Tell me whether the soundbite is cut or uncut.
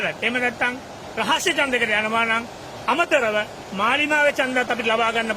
uncut